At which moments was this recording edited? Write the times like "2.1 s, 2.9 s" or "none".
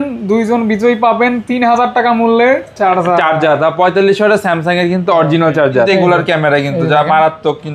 5.9 s